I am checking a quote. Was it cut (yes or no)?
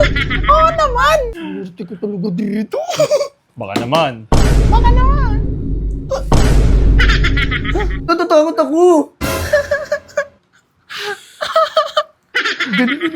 yes